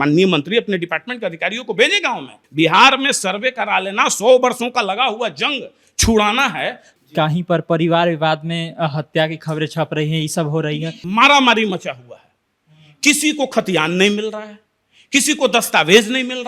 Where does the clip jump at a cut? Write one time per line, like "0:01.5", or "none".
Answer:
0:02.3
0:07.0
0:10.9